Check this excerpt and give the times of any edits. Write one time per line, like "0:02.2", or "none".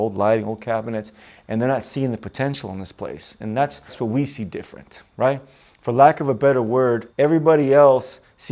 0:04.0
0:07.1